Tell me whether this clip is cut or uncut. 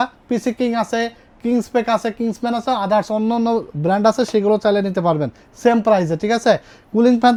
uncut